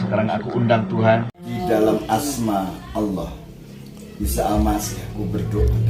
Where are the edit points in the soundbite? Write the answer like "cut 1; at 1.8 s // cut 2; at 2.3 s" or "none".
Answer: cut 1; at 1.4 s